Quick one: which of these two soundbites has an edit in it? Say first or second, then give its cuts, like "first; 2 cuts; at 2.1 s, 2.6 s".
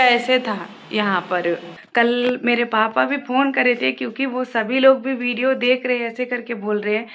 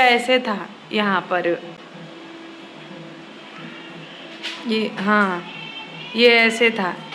first; 1 cut; at 1.8 s